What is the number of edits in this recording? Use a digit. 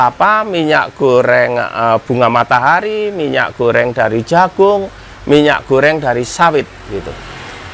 0